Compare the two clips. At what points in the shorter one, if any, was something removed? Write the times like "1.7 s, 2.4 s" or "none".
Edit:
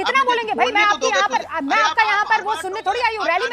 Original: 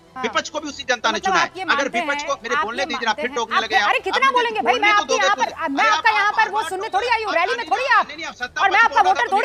none